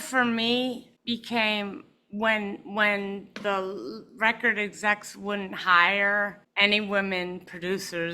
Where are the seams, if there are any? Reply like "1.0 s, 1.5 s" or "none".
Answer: 0.9 s, 6.4 s